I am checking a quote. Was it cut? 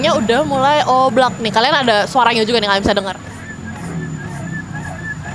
no; 0 cuts

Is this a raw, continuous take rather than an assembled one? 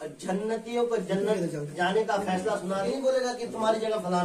no; 1 cut; at 2.8 s

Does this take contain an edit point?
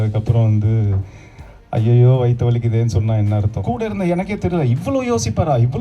yes; 1 cut; at 3.5 s

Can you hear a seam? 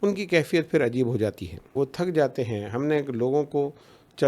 yes; 1 cut; at 1.7 s

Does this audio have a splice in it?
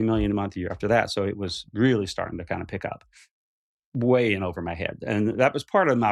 no; 0 cuts

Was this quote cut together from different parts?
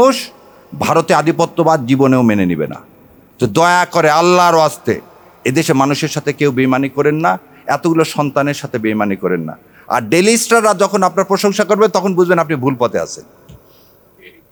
no; 0 cuts

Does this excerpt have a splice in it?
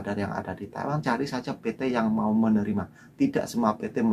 yes; 1 cut; at 1.0 s

